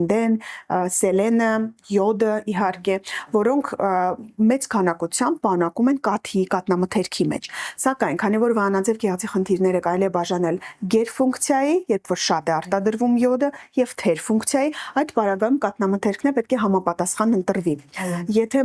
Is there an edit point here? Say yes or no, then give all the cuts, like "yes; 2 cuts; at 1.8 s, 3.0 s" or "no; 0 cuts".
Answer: no; 0 cuts